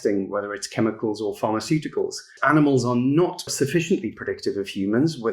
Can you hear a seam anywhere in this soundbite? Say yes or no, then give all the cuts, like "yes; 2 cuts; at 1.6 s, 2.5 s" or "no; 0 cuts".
yes; 2 cuts; at 2.4 s, 3.5 s